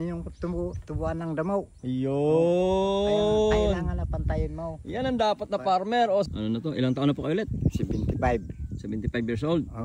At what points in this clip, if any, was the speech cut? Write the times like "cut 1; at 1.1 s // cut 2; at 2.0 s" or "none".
cut 1; at 6.3 s